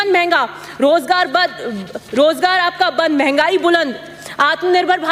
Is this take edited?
no; 0 cuts

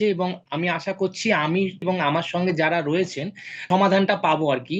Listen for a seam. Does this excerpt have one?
yes; 2 cuts; at 1.8 s, 3.6 s

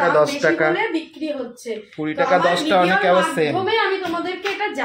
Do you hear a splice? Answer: no; 0 cuts

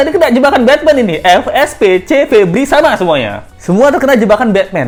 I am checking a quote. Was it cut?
no; 0 cuts

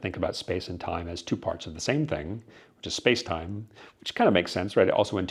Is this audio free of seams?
yes; 0 cuts

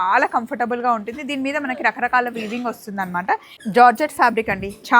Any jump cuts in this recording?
yes; 1 cut; at 3.5 s

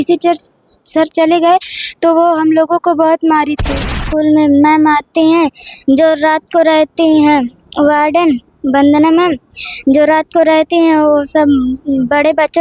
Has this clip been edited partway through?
yes; 1 cut; at 3.8 s

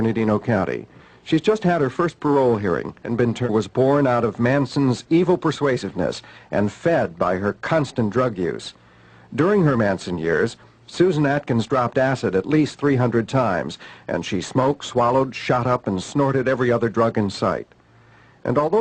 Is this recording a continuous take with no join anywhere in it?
yes; 0 cuts

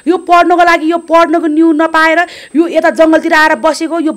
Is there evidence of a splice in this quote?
no; 0 cuts

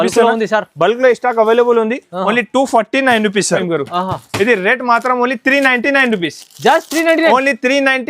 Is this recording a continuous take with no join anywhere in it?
no; 1 cut; at 3.6 s

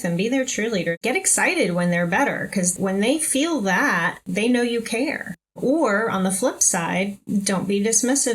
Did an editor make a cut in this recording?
yes; 3 cuts; at 1.0 s, 2.7 s, 4.3 s

